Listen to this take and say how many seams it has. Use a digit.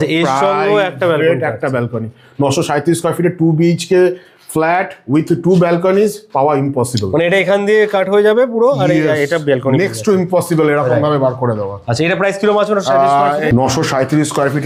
0